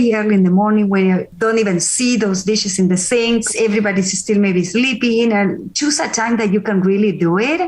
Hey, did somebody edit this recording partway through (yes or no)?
yes